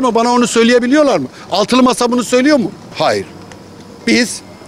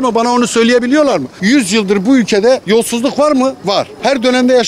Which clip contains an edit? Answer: second; 3 cuts; at 1.3 s, 2.6 s, 3.7 s

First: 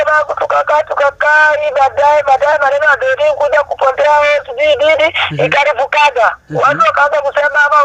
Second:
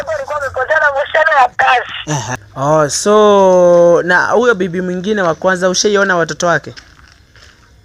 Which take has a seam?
second; 1 cut; at 2.3 s

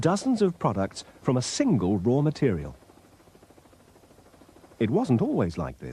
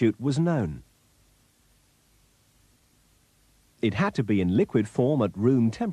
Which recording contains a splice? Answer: first; 1 cut; at 4.7 s

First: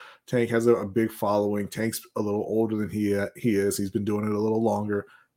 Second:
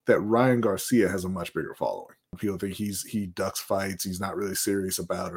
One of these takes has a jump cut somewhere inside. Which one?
second; 1 cut; at 2.4 s

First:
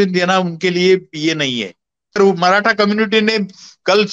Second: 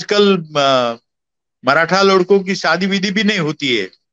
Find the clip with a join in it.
first; 1 cut; at 2.1 s

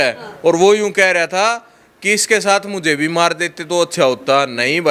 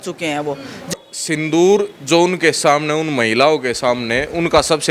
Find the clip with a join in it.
second; 1 cut; at 0.9 s

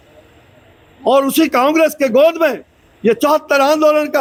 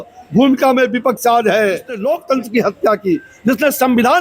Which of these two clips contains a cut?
second; 1 cut; at 1.9 s

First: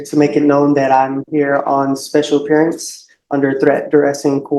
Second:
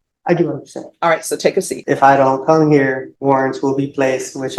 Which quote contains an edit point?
second; 2 cuts; at 1.8 s, 3.1 s

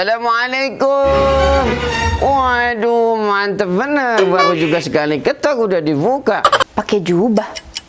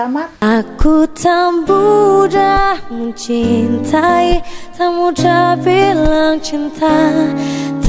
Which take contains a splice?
first; 1 cut; at 6.6 s

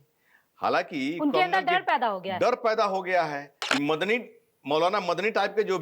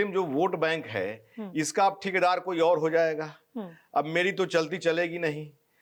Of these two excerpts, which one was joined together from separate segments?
first; 1 cut; at 3.6 s

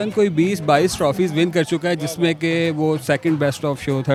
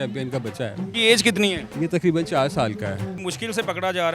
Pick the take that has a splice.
second; 3 cuts; at 0.9 s, 1.7 s, 3.2 s

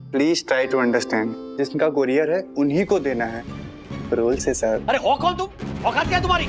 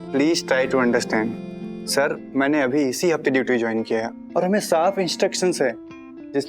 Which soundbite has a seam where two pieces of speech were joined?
first; 2 cuts; at 1.4 s, 4.8 s

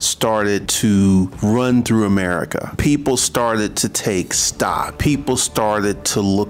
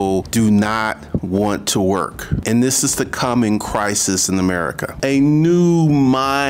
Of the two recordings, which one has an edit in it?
second; 1 cut; at 4.9 s

